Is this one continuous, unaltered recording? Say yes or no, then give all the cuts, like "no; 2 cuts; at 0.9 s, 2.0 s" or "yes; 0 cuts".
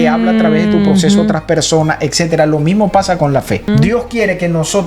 no; 1 cut; at 3.7 s